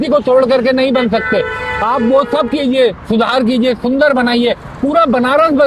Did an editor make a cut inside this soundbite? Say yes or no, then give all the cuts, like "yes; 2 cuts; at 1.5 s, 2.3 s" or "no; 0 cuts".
no; 0 cuts